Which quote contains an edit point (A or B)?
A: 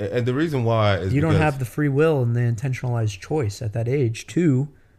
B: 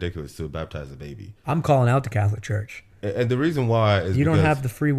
B